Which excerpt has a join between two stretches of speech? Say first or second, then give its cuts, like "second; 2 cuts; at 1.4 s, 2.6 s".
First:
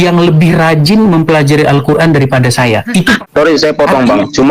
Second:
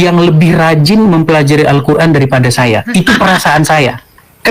first; 1 cut; at 3.2 s